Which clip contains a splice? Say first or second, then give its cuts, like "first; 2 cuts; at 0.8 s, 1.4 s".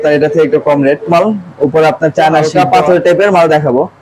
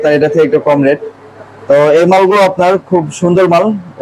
first; 2 cuts; at 1.1 s, 2.5 s